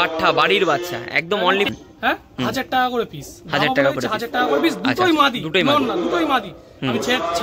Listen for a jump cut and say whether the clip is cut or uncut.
cut